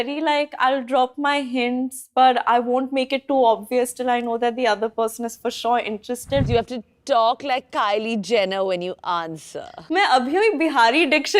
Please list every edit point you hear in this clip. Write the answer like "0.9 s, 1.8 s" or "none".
6.5 s, 9.8 s